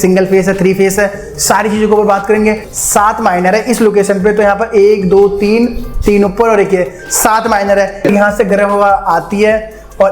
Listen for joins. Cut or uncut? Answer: cut